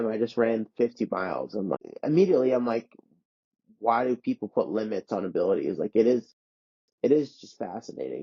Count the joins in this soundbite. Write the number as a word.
one